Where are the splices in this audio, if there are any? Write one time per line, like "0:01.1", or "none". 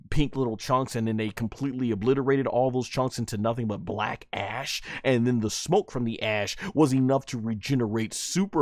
none